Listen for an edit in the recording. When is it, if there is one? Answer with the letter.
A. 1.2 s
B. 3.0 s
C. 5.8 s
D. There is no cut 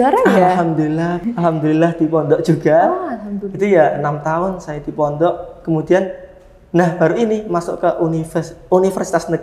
A